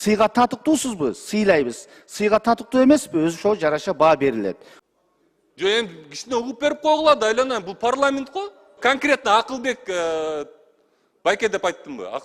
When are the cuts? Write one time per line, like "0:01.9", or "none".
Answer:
0:04.7
0:08.8